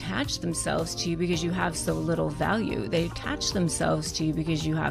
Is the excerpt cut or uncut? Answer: uncut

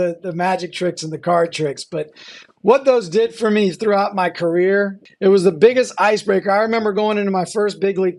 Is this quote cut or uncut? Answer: cut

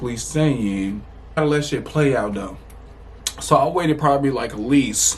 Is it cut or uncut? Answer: cut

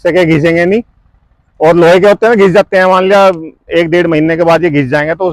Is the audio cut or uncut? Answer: uncut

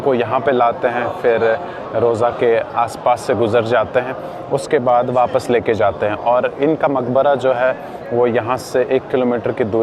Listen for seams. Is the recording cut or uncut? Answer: uncut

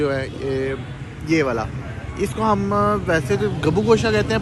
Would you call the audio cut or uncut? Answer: uncut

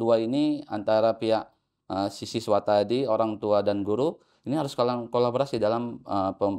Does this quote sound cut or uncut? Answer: uncut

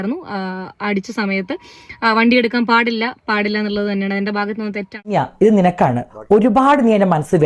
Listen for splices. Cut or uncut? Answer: cut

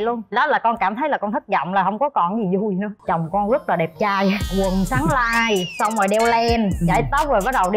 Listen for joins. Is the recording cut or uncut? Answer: cut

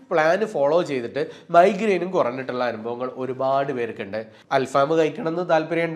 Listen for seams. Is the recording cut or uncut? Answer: cut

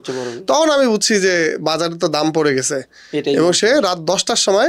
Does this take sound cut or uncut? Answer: uncut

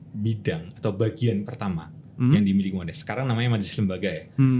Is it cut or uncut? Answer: uncut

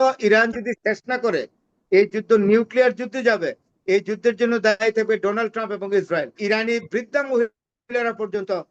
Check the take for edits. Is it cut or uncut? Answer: cut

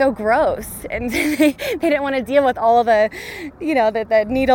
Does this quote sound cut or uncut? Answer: uncut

